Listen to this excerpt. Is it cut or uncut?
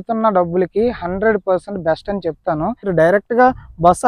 cut